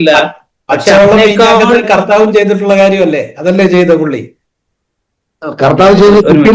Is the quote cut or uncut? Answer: uncut